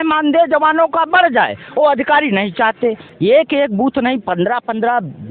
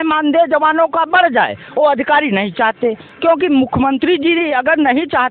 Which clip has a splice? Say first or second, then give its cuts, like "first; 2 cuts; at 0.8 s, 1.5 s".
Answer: first; 1 cut; at 3.1 s